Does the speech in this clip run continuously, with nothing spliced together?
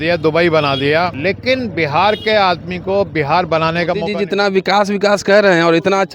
no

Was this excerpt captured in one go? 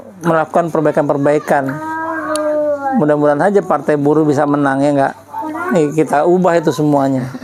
yes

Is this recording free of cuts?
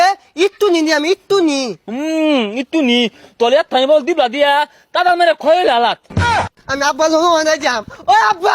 no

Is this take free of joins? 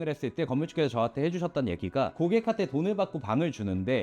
no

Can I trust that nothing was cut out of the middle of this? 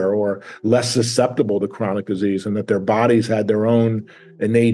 yes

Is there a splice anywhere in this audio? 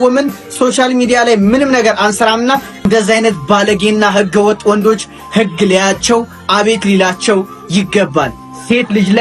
no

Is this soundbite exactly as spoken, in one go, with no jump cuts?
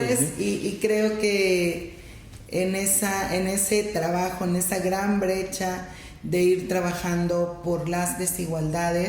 yes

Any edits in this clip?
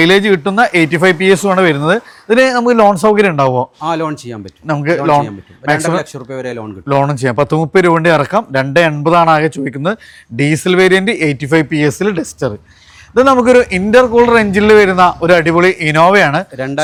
no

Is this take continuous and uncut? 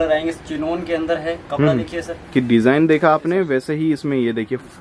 no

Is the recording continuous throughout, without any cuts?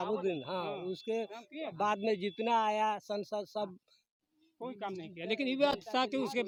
yes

